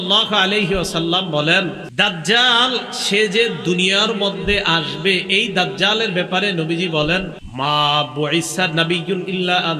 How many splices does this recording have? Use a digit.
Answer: 2